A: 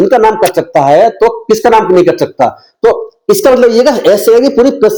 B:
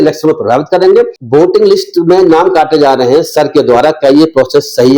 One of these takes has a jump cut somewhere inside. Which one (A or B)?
B